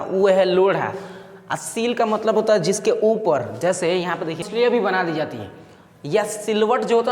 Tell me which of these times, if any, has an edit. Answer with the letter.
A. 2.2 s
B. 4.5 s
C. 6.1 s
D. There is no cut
B